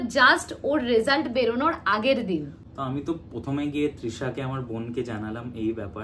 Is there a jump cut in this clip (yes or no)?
no